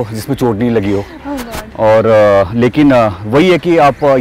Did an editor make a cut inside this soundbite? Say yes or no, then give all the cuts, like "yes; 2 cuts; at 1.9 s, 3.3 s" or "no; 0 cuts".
no; 0 cuts